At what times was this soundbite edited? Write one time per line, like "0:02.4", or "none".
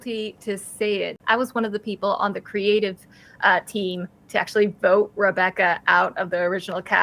0:01.2